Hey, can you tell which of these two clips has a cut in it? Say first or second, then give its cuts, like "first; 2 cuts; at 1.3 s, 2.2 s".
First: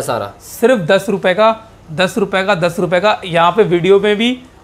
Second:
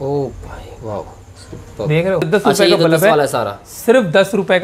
second; 1 cut; at 2.3 s